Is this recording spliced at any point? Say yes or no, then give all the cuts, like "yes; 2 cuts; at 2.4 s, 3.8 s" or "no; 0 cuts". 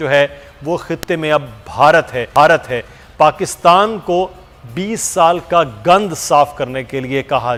no; 0 cuts